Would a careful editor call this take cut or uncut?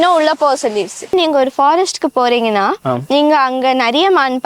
cut